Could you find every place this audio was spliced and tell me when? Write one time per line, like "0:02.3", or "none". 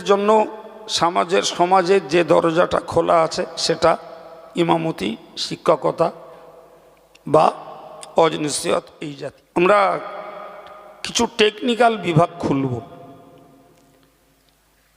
0:09.0